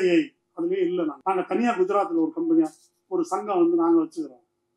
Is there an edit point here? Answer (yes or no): yes